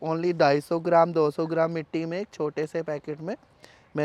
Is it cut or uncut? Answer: uncut